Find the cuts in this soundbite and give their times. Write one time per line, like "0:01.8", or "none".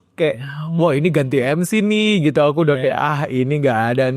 none